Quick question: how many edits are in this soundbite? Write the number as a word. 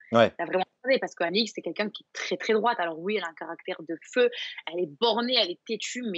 zero